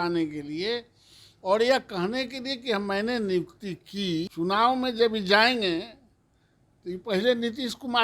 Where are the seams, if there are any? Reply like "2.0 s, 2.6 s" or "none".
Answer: 4.3 s